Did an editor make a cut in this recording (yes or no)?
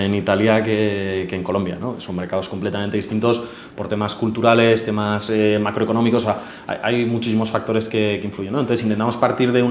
no